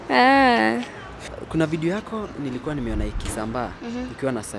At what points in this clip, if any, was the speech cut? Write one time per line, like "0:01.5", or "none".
0:01.3